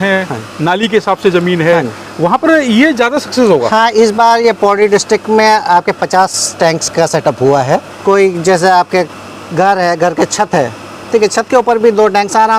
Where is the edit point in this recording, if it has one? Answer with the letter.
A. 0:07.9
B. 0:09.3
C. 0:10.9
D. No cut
A